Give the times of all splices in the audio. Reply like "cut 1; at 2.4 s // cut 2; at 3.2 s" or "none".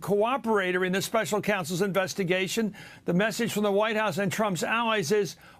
cut 1; at 4.5 s